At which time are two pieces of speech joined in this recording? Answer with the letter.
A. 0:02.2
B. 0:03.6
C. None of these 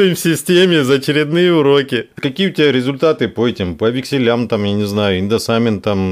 A